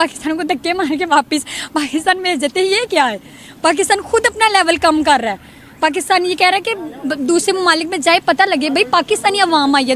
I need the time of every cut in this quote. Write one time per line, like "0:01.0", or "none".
none